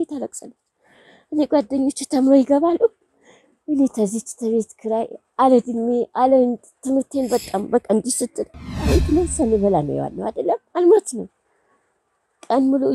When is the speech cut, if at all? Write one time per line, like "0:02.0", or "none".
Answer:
0:08.8